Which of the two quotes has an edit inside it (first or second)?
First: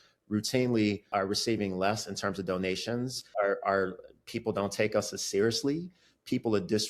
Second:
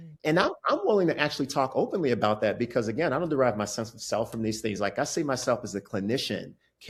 first